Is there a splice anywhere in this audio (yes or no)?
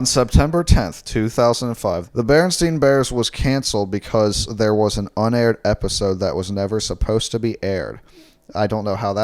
yes